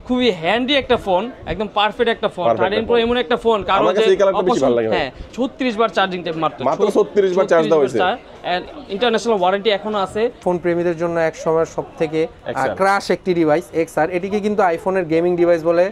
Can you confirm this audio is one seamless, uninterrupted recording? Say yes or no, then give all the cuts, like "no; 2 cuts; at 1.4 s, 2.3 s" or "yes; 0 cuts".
no; 2 cuts; at 5.3 s, 10.4 s